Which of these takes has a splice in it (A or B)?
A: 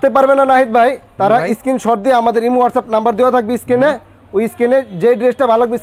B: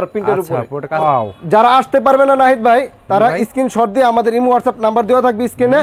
B